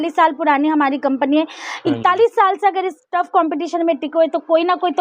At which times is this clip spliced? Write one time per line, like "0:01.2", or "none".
none